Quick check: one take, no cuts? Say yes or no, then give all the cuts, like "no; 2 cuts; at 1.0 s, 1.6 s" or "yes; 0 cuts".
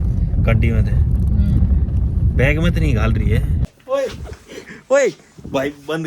no; 1 cut; at 3.6 s